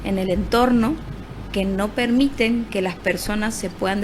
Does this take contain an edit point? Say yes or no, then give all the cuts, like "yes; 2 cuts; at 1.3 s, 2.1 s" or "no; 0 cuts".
no; 0 cuts